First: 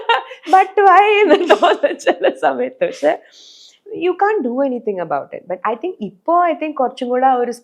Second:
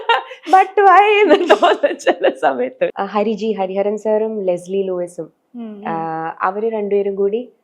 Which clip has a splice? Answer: second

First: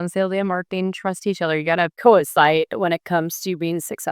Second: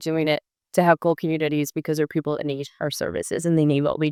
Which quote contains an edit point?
first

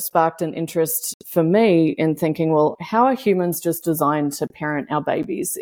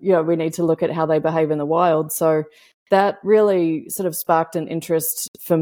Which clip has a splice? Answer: first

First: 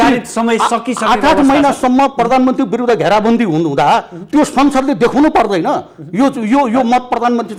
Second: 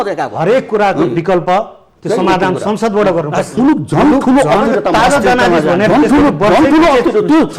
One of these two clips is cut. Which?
second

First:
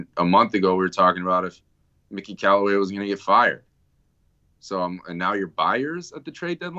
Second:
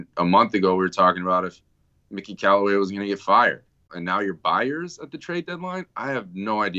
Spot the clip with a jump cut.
second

